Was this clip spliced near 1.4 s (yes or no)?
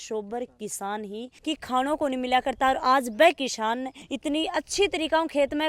yes